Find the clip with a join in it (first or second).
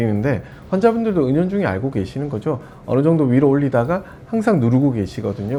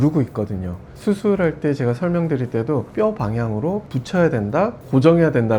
second